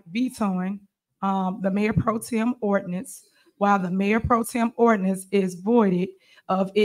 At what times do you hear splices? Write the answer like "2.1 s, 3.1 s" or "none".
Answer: none